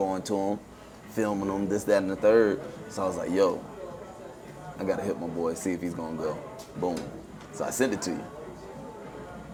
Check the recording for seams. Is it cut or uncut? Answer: uncut